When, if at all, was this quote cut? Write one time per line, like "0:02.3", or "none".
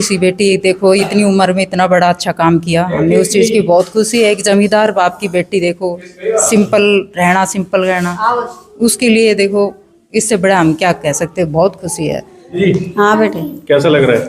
0:12.6